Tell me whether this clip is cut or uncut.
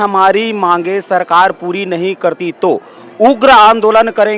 uncut